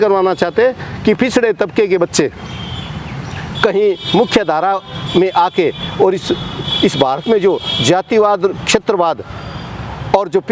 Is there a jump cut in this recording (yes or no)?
no